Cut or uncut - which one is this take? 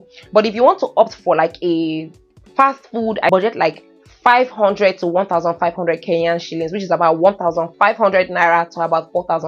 cut